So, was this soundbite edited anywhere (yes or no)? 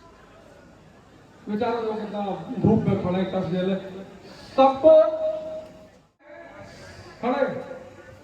yes